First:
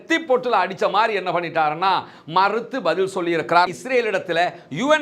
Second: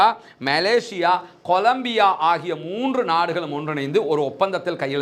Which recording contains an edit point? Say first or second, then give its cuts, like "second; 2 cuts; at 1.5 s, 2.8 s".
first; 1 cut; at 3.8 s